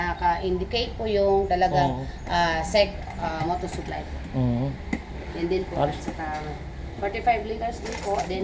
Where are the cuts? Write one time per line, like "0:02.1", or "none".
none